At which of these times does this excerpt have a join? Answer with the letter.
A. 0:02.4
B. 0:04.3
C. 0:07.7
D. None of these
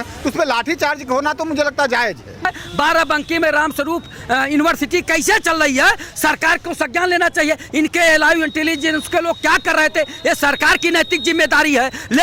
A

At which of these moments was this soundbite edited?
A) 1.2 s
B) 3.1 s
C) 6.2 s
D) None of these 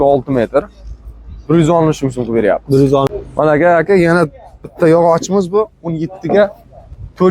B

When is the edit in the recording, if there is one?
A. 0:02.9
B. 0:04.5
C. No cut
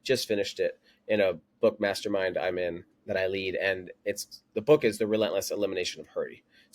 A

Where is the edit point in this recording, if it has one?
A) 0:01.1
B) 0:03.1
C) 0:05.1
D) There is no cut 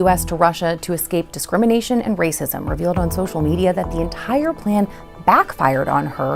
D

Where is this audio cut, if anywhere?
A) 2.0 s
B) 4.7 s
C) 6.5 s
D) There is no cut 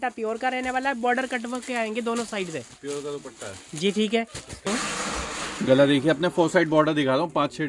B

